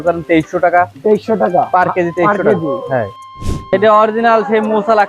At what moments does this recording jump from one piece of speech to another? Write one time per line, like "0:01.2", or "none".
0:03.6